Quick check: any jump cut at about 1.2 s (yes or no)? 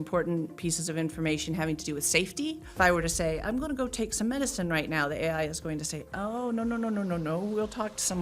no